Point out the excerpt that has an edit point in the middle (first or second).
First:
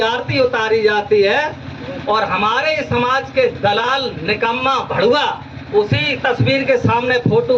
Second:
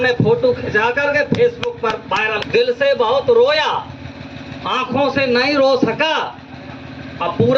second